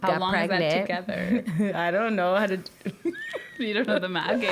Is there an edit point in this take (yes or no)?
yes